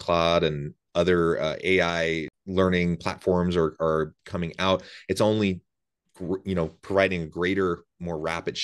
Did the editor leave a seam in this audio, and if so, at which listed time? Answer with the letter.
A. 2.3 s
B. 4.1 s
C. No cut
A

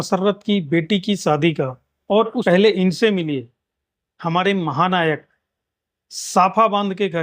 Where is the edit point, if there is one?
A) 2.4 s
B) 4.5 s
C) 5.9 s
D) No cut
A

